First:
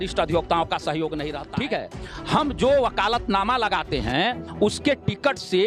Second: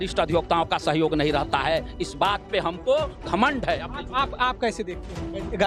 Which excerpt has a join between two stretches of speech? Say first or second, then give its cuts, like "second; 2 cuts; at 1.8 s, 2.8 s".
first; 1 cut; at 1.3 s